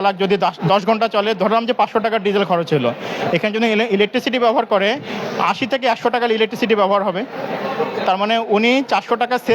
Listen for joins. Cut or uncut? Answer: uncut